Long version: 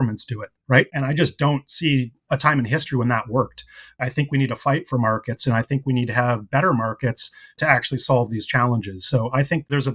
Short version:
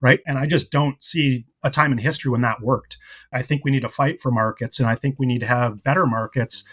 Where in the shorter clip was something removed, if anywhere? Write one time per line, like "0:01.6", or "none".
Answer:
none